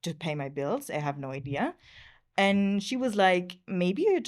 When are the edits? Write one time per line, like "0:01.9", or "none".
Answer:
none

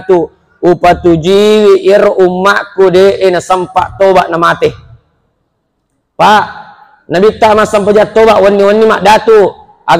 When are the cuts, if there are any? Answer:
none

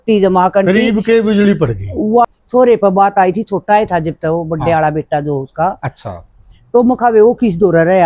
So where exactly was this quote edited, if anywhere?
0:02.2

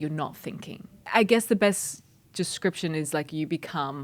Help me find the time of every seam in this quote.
0:01.1

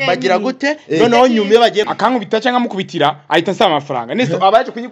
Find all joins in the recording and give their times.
0:01.9

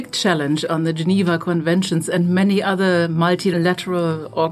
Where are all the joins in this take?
0:03.5

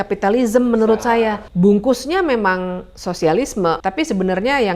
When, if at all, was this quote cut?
0:01.4
0:03.8

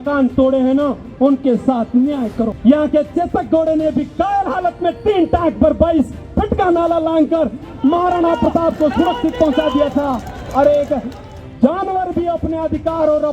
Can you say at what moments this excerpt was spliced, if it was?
0:02.5

